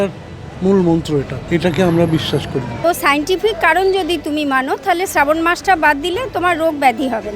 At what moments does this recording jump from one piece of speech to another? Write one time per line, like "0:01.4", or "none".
0:01.4
0:02.7

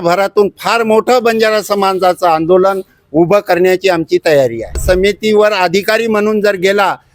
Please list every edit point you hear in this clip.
0:04.8

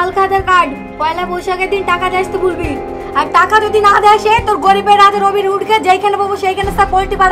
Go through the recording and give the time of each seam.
none

